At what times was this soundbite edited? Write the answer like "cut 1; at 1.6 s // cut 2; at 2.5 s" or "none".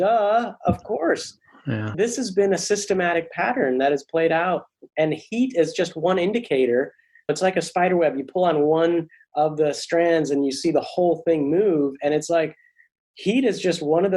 cut 1; at 1.9 s // cut 2; at 7.3 s